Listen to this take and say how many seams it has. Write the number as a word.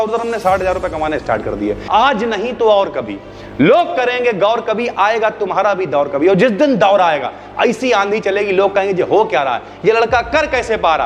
one